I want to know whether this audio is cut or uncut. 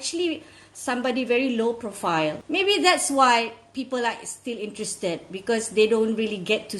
cut